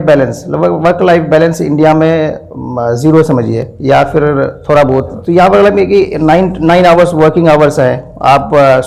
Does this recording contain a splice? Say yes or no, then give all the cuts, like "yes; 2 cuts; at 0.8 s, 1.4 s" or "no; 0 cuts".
no; 0 cuts